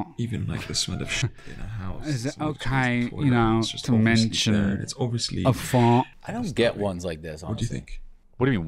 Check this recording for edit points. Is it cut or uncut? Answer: cut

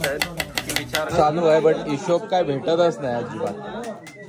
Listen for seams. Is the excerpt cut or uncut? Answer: cut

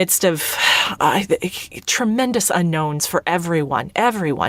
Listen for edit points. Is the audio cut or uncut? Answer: uncut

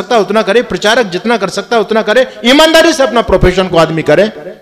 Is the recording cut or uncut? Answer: uncut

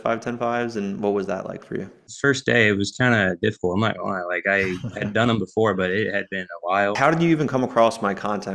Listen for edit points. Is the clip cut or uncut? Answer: cut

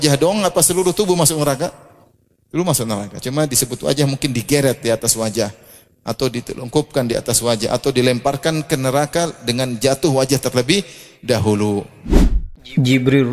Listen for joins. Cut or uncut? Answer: cut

